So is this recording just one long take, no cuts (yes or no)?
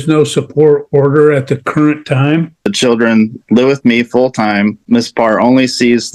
no